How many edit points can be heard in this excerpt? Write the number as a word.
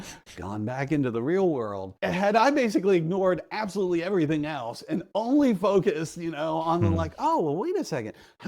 one